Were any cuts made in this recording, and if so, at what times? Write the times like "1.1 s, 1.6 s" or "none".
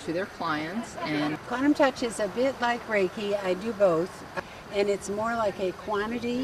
1.4 s, 4.3 s